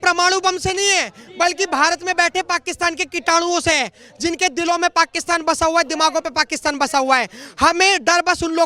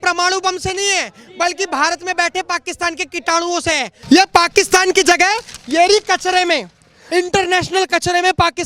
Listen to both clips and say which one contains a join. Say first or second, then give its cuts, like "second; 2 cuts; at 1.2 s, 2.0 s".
second; 2 cuts; at 4.0 s, 7.0 s